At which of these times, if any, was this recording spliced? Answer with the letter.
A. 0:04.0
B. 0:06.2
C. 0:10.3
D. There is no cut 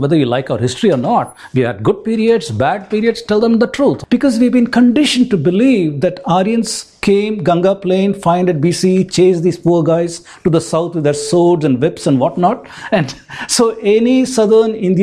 A